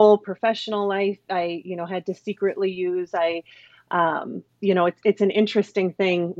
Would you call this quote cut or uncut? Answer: uncut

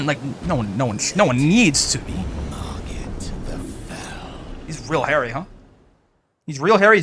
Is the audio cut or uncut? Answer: uncut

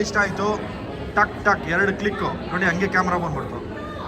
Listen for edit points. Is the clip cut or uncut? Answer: cut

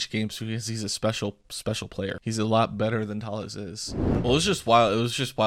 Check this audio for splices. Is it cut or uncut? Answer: cut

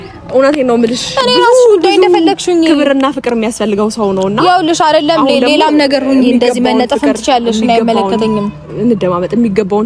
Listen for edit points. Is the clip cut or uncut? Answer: uncut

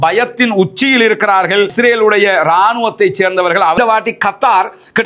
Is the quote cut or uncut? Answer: cut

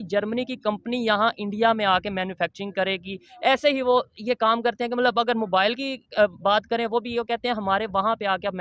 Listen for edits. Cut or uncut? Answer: uncut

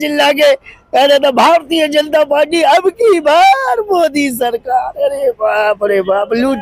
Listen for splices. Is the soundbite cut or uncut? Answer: uncut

